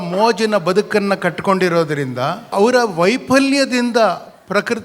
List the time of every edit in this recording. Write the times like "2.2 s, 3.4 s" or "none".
2.5 s